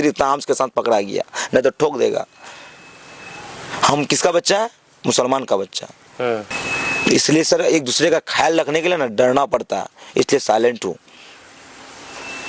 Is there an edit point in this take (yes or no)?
no